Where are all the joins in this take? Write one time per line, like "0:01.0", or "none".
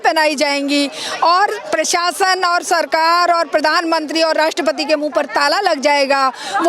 none